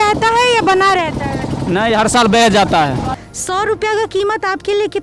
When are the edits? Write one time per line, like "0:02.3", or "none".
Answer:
0:03.2

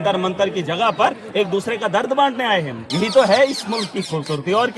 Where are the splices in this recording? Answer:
0:02.8

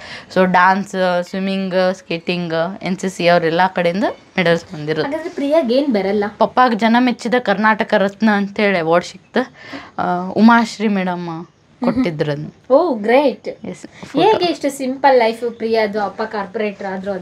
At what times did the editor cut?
0:06.4
0:13.9

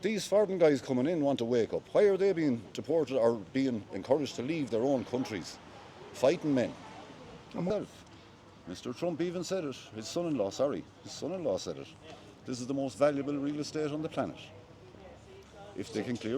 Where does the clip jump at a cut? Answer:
none

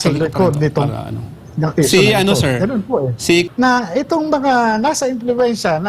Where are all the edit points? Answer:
0:03.5

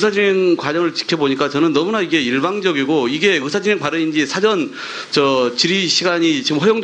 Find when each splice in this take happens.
none

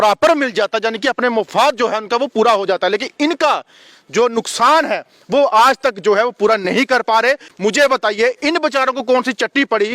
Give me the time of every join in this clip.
0:07.5

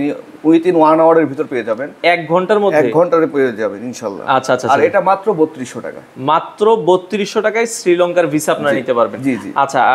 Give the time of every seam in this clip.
none

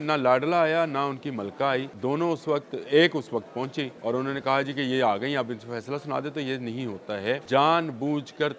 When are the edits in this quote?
0:01.9
0:03.9
0:07.4

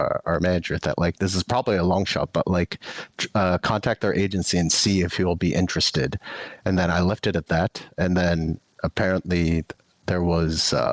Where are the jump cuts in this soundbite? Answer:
none

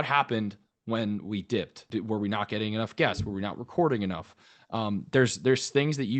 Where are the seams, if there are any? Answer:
0:01.8

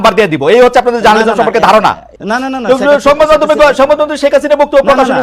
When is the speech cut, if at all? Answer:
0:02.1

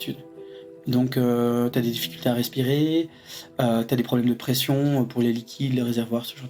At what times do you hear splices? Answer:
none

